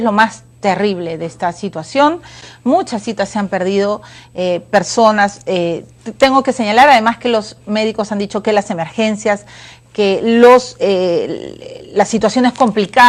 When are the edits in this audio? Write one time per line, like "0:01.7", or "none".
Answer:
0:05.2